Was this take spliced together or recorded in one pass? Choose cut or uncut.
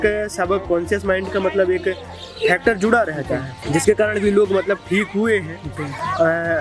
uncut